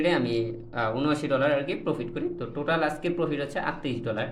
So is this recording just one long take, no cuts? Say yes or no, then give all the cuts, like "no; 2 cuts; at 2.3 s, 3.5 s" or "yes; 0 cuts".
yes; 0 cuts